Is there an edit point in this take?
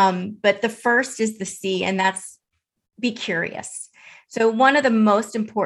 no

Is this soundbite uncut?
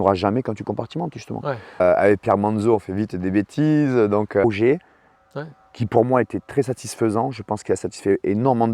no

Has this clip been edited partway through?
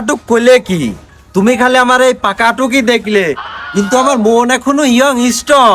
no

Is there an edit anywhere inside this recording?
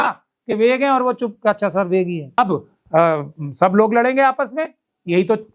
yes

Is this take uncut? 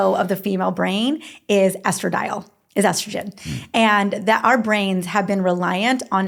yes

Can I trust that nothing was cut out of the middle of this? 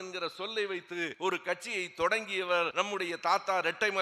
no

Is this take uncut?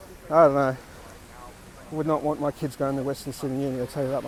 yes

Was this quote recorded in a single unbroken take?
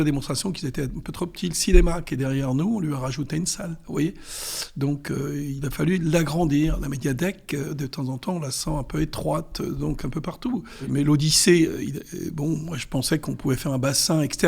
no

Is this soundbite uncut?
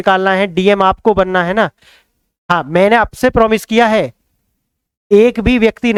yes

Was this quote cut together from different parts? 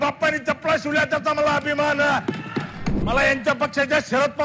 yes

